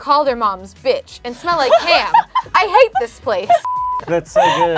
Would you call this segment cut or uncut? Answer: uncut